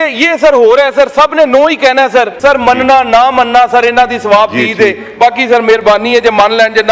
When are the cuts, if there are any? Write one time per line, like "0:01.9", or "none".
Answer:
0:02.3